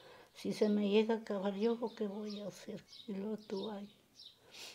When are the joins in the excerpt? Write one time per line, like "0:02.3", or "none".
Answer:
0:02.8